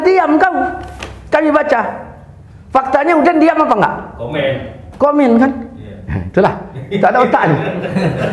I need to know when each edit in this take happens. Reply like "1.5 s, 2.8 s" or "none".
none